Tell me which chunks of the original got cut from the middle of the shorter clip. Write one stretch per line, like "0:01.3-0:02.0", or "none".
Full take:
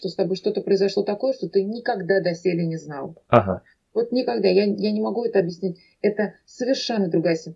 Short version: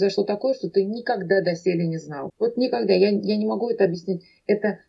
0:03.0-0:03.7

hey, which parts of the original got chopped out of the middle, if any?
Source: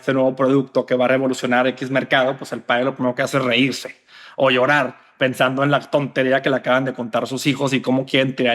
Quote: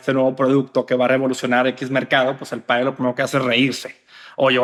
none

